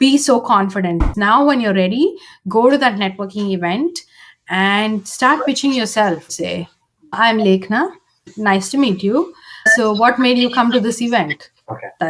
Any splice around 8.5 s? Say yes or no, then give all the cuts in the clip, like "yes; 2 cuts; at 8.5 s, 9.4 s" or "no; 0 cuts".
no; 2 cuts; at 1.0 s, 6.5 s